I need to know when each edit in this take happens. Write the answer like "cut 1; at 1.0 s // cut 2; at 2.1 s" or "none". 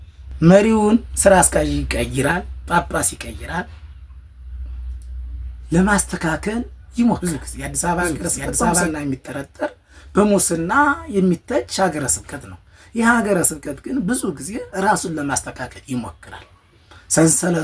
cut 1; at 7.2 s